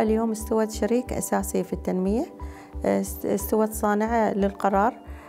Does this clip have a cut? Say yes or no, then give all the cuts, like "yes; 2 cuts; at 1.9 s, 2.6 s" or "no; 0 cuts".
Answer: no; 0 cuts